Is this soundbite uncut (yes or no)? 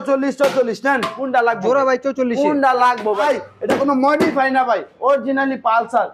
no